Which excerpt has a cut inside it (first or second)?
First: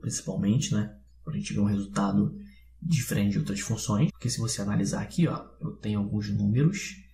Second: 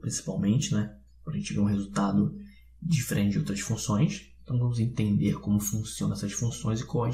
second